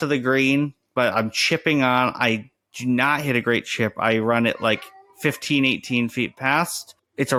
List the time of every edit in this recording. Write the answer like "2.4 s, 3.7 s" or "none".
none